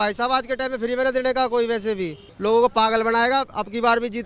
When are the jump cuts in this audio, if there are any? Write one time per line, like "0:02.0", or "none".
0:02.3

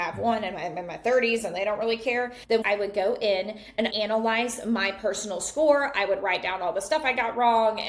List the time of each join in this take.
0:02.4

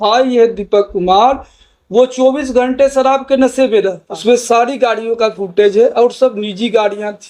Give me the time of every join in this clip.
0:04.1

